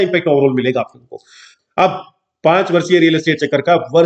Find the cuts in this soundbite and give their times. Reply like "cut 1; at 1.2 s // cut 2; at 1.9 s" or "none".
cut 1; at 1.5 s